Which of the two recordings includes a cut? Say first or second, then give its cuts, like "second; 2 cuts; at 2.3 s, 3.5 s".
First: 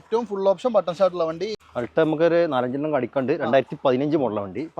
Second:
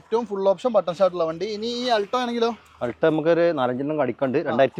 first; 1 cut; at 1.6 s